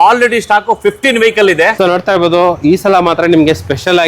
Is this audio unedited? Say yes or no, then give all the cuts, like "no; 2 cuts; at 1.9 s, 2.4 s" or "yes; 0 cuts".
no; 1 cut; at 1.7 s